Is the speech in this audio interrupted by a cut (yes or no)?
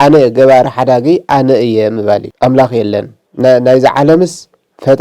yes